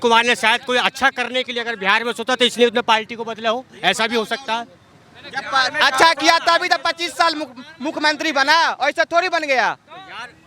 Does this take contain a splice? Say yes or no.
no